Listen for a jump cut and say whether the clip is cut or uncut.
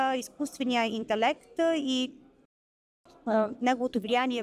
uncut